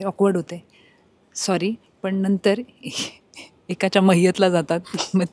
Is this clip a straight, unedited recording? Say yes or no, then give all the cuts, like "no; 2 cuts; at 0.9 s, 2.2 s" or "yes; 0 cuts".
yes; 0 cuts